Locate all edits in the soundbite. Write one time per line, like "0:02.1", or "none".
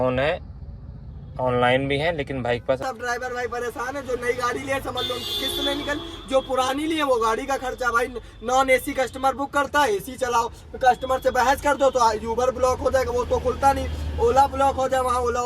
0:02.8